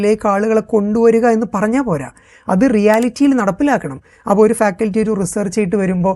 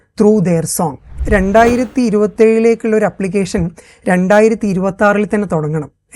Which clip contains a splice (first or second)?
second